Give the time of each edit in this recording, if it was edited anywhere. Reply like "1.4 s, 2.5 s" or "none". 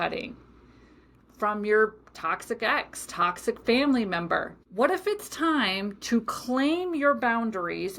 4.6 s